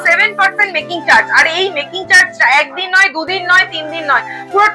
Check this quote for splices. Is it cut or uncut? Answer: uncut